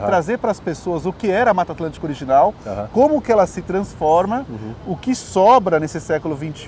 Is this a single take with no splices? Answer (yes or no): yes